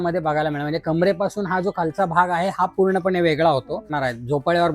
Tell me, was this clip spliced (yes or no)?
yes